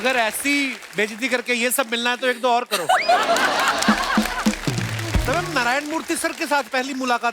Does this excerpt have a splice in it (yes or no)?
yes